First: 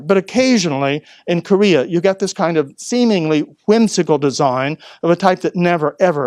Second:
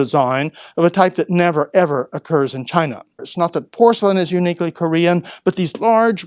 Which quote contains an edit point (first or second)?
second